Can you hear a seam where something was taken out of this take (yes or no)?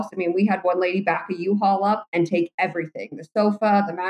yes